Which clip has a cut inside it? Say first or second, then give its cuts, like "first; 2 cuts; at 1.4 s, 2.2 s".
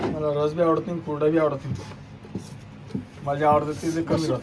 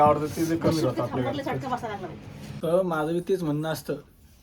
second; 1 cut; at 2.6 s